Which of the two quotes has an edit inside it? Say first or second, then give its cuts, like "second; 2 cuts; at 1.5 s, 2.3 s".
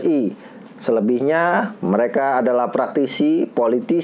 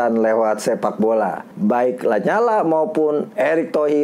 second; 1 cut; at 1.5 s